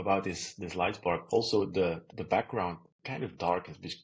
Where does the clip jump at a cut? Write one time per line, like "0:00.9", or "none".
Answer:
0:02.1